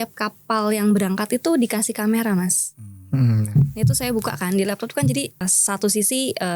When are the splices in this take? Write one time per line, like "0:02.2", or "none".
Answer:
0:05.5